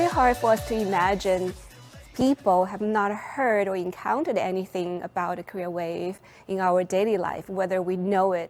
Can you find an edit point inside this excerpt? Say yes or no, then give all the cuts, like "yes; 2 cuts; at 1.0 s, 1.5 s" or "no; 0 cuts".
no; 0 cuts